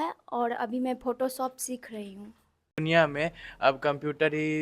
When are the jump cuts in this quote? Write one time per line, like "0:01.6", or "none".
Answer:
0:02.7

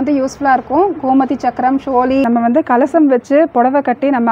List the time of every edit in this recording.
0:02.3

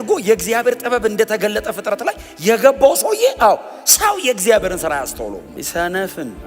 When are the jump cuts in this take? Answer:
0:05.5

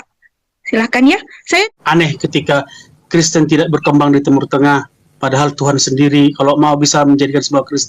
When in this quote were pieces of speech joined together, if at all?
0:01.7

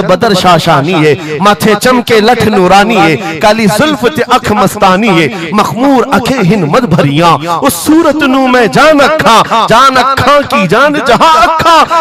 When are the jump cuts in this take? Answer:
none

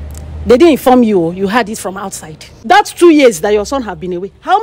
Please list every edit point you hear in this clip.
0:02.6

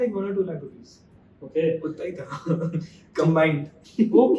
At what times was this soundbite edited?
none

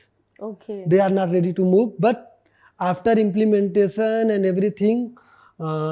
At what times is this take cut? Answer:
none

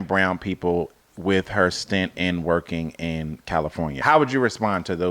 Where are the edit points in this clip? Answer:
0:04.0

